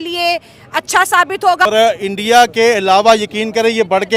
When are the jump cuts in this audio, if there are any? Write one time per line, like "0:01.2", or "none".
0:01.6